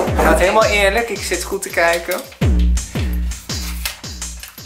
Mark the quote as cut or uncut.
uncut